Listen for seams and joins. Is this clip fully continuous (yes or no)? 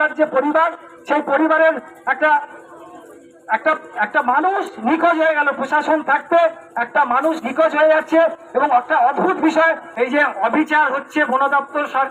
no